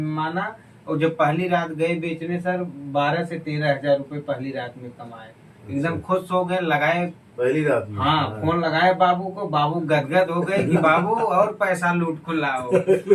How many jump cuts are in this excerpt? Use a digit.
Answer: 0